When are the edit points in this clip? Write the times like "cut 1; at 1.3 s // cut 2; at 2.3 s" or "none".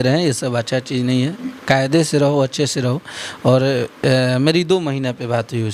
none